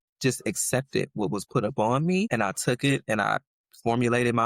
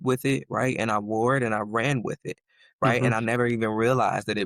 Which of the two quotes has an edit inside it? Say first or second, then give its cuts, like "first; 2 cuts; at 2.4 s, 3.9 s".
first; 1 cut; at 2.3 s